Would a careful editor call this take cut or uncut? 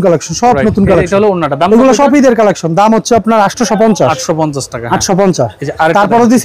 uncut